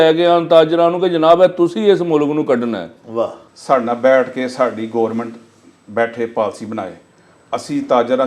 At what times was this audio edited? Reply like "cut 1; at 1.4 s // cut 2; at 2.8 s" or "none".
cut 1; at 3.5 s